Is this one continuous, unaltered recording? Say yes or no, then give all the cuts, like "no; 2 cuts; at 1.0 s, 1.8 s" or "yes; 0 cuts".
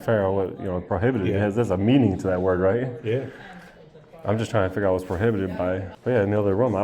no; 1 cut; at 5.9 s